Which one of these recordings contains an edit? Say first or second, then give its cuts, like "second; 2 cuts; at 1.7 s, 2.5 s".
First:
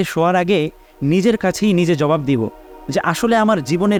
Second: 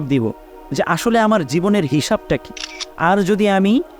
second; 1 cut; at 2.8 s